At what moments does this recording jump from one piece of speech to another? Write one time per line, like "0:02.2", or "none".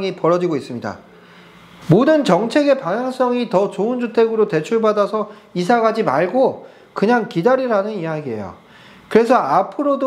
0:01.7